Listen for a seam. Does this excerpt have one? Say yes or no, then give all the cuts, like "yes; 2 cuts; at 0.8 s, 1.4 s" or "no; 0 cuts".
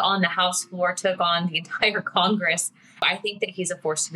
yes; 1 cut; at 3.0 s